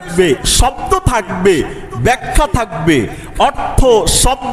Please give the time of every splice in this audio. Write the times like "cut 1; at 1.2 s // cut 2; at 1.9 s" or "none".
none